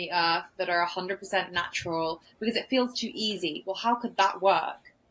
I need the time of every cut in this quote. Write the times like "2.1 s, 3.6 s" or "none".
none